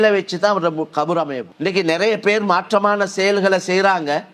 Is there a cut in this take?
yes; 1 cut; at 1.4 s

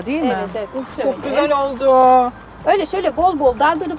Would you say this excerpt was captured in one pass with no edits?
no; 1 cut; at 2.4 s

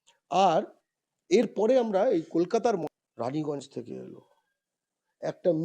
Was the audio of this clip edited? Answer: yes; 1 cut; at 2.9 s

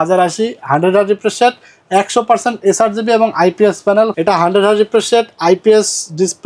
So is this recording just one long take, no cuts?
no; 1 cut; at 4.1 s

